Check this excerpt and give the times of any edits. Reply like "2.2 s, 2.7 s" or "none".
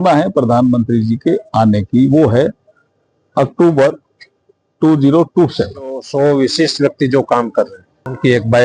6.1 s